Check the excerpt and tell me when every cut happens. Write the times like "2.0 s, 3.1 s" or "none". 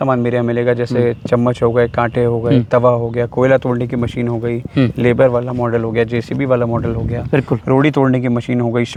none